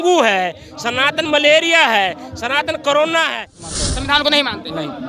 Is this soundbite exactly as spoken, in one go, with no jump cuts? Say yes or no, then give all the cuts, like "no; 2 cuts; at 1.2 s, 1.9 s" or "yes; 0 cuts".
no; 1 cut; at 3.6 s